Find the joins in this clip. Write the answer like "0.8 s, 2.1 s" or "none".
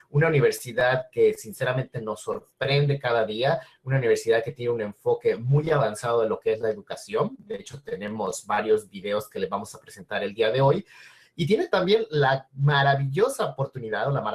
10.9 s